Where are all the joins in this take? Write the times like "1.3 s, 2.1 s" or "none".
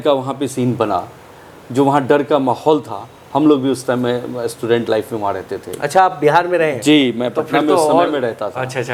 none